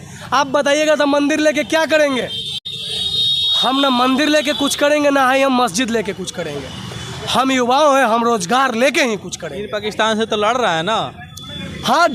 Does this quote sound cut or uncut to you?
uncut